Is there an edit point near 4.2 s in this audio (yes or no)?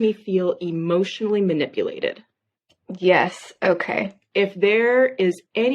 yes